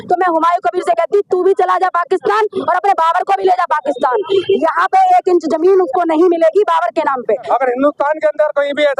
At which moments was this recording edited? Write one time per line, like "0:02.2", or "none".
0:07.5